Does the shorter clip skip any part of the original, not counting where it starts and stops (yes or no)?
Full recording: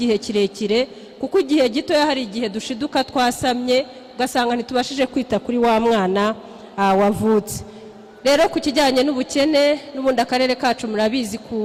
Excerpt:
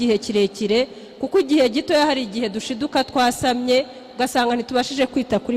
no